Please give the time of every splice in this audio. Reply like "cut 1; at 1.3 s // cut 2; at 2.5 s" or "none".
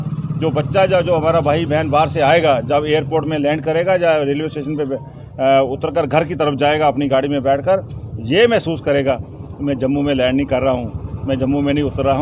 none